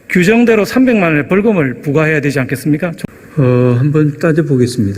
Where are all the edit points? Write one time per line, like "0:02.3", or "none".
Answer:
0:03.0